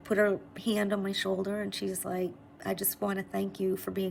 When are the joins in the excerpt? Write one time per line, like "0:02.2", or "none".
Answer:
none